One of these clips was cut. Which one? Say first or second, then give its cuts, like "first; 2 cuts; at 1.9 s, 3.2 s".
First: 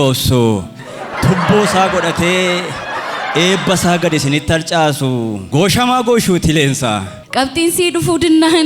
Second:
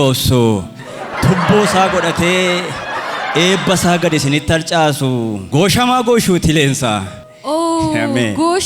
first; 1 cut; at 7.2 s